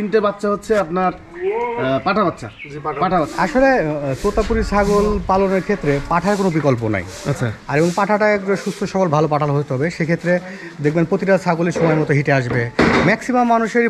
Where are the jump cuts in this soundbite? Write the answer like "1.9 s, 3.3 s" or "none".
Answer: 3.3 s